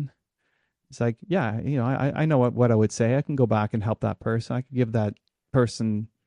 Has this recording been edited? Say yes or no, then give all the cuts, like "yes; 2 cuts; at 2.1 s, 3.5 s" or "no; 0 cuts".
no; 0 cuts